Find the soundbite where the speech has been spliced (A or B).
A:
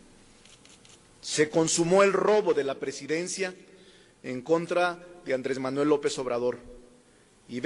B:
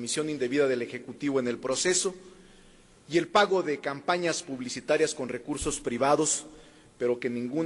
B